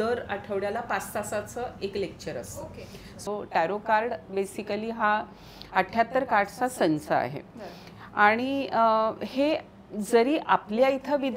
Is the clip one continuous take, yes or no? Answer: no